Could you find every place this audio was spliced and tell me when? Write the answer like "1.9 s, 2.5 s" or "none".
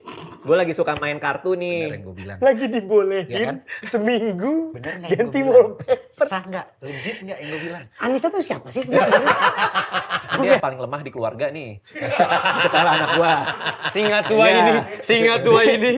10.6 s